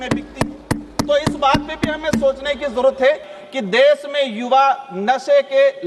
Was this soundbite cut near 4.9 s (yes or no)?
no